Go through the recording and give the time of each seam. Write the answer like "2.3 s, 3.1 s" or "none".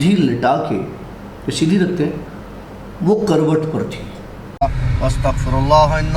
4.5 s